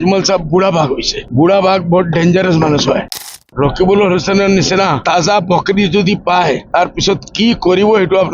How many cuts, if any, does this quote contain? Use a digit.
4